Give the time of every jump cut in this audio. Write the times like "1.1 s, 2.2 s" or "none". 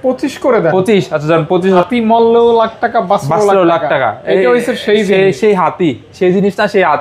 1.8 s